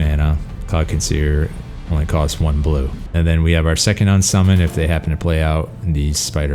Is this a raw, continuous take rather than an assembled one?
no; 1 cut; at 3.0 s

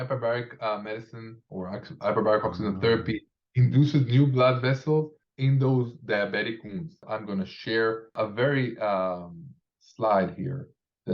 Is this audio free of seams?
no; 3 cuts; at 5.2 s, 7.1 s, 8.1 s

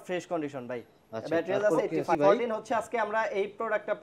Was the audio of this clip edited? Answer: yes; 1 cut; at 1.9 s

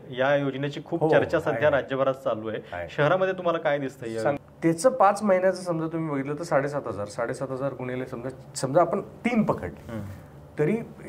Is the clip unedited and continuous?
no; 1 cut; at 4.5 s

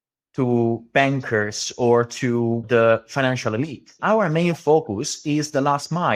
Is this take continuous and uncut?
no; 2 cuts; at 2.6 s, 3.9 s

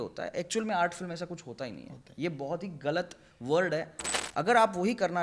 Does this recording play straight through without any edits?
no; 1 cut; at 3.9 s

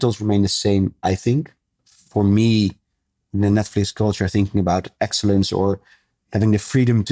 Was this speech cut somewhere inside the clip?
no; 0 cuts

